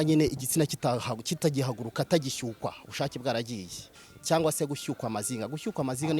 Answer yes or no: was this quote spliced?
yes